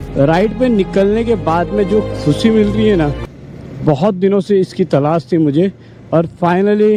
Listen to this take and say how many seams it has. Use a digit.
0